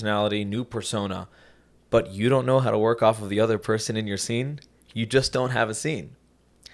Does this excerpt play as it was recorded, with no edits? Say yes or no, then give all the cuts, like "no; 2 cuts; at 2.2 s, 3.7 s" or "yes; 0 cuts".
yes; 0 cuts